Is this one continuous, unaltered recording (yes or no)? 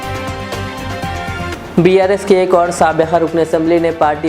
no